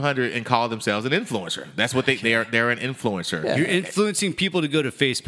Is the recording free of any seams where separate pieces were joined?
yes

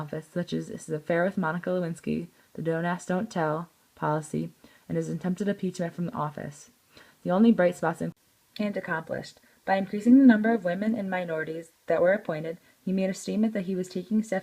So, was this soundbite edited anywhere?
yes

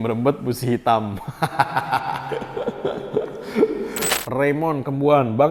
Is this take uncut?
no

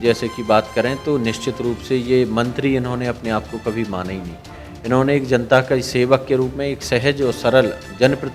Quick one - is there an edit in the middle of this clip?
no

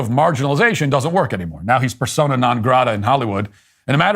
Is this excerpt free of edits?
no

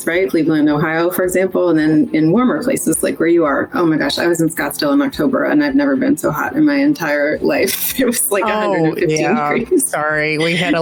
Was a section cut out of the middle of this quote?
no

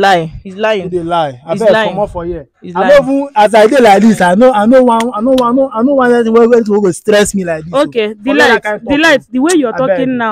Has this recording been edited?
no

